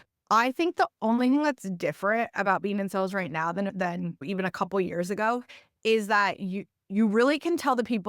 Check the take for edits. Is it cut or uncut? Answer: cut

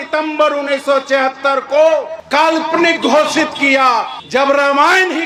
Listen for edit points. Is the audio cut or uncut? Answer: uncut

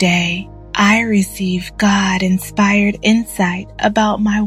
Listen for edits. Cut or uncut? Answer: uncut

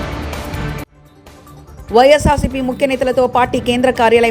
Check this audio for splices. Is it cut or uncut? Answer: cut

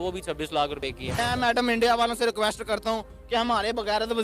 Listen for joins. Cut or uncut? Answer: cut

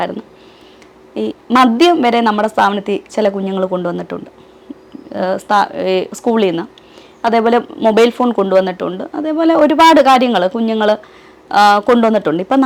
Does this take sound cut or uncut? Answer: uncut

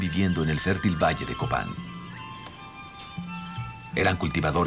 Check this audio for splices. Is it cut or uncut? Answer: uncut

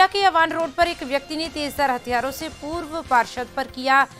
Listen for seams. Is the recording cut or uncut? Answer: uncut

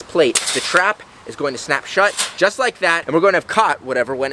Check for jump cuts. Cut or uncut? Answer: uncut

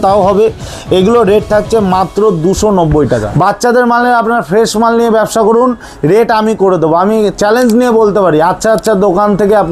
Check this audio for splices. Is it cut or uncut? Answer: cut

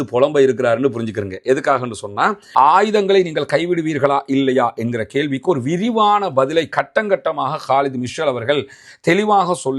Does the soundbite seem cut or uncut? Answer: cut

